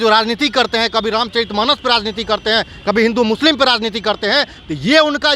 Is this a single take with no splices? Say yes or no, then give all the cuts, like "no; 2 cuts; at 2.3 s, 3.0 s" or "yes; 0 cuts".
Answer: yes; 0 cuts